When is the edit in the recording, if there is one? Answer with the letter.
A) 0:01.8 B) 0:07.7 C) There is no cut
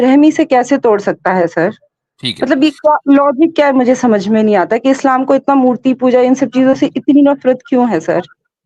C